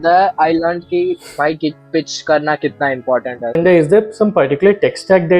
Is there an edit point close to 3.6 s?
yes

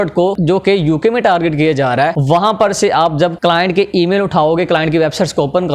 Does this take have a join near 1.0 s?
no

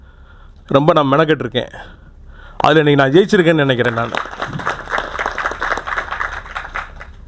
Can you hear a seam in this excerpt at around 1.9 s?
no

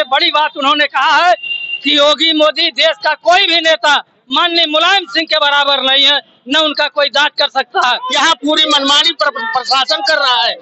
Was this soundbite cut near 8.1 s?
yes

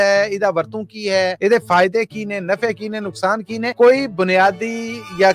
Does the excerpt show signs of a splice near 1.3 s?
yes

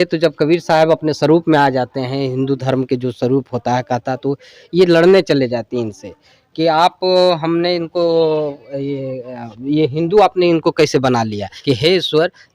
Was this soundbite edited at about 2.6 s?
no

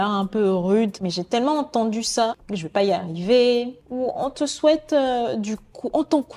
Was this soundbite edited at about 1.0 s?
yes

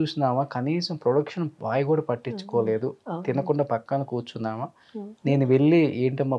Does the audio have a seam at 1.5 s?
no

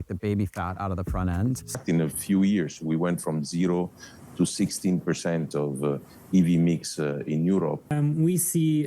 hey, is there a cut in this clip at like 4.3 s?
no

